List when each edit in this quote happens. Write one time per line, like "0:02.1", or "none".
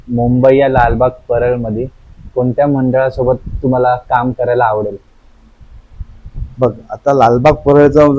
none

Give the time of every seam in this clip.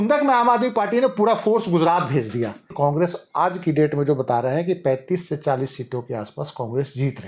0:02.7

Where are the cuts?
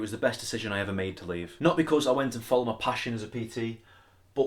0:01.5

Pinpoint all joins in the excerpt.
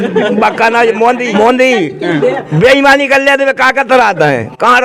0:01.3

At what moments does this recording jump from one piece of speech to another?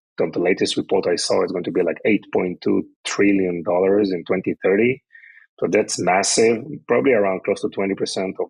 none

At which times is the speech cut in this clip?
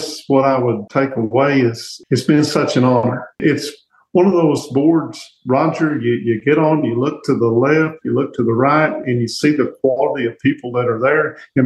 0:00.8
0:01.9
0:03.4

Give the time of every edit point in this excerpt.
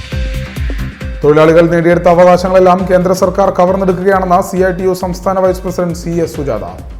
none

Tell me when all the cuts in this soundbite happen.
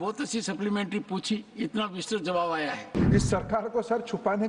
0:03.0

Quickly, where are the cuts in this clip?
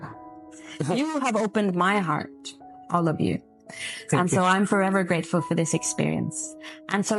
none

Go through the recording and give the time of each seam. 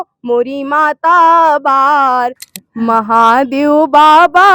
0:02.4

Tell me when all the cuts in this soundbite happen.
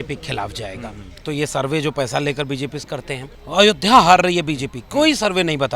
0:01.3
0:03.3

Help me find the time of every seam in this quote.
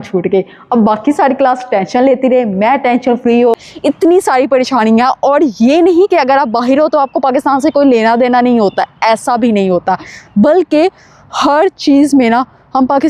0:03.6

